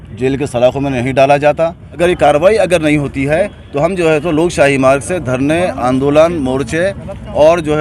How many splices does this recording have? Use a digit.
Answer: 1